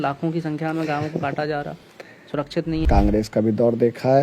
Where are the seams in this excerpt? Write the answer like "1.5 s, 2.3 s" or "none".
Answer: 2.9 s